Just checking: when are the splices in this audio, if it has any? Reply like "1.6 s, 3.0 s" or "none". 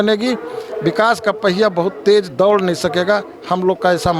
none

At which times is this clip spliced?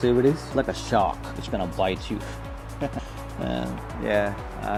none

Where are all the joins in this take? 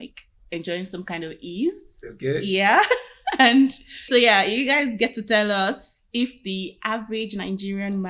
4.1 s

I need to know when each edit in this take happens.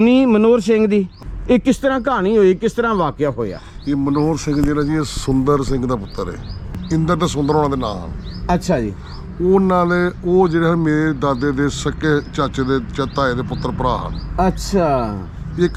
6.8 s

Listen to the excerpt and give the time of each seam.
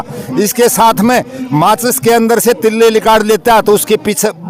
none

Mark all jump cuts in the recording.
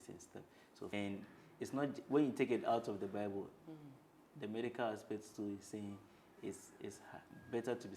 0.9 s

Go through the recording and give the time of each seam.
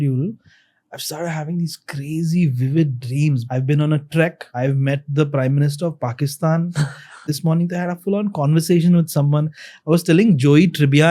3.4 s, 4.4 s, 7.3 s

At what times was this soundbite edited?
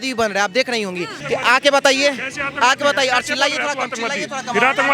1.1 s

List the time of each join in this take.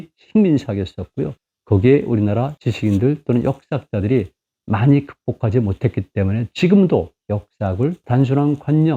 8.0 s

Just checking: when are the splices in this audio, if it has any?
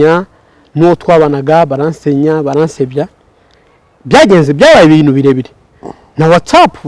none

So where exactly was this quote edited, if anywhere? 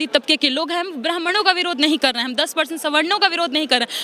none

